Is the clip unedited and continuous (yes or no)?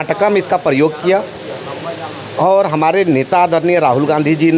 yes